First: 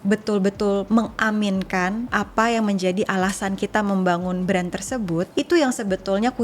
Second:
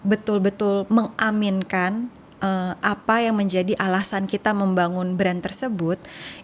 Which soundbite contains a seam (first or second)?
first